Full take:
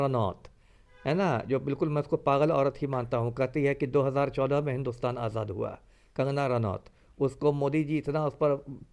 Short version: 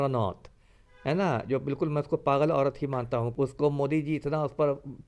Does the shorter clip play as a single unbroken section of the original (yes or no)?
no